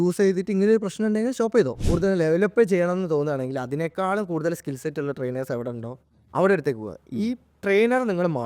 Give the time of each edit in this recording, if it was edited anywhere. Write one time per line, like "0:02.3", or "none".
0:01.8